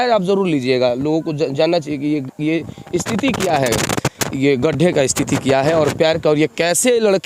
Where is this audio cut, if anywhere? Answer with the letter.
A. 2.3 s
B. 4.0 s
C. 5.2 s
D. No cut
D